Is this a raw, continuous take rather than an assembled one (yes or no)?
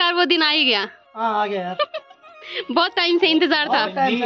yes